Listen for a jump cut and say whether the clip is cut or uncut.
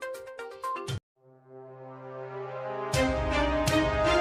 uncut